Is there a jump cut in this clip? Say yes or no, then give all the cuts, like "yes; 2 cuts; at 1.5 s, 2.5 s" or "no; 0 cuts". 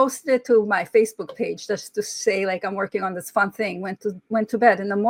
no; 0 cuts